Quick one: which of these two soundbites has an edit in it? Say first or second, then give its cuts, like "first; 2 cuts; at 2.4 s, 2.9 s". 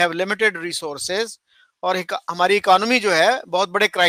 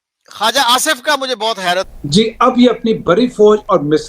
second; 1 cut; at 2.0 s